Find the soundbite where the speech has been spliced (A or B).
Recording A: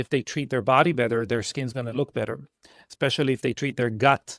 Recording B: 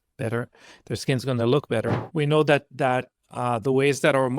B